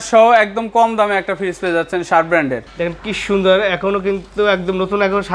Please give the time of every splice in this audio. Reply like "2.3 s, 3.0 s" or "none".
2.6 s